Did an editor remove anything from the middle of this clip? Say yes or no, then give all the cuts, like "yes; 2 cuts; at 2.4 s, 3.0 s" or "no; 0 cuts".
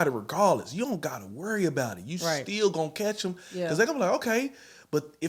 no; 0 cuts